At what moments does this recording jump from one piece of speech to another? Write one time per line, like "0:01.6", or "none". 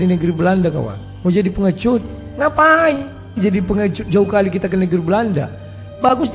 none